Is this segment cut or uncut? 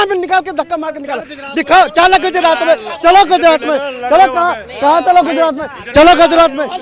uncut